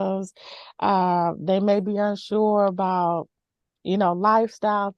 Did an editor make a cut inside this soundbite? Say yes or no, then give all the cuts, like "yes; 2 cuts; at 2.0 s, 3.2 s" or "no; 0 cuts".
no; 0 cuts